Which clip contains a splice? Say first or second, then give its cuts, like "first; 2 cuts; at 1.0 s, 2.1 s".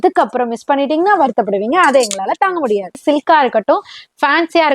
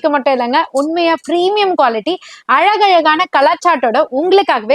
first; 1 cut; at 3.0 s